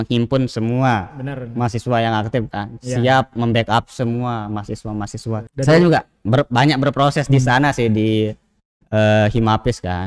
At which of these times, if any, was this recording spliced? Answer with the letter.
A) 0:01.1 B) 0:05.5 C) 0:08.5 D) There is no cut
B